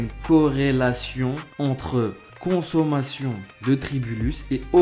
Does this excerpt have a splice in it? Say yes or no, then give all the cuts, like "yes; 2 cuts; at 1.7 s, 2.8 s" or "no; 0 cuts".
yes; 3 cuts; at 1.5 s, 2.3 s, 3.5 s